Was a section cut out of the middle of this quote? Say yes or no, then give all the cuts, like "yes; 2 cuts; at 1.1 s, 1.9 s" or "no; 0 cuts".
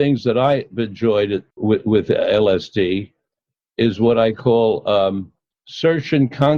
yes; 1 cut; at 1.5 s